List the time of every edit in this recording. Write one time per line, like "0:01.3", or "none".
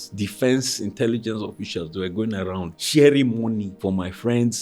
0:02.8
0:03.7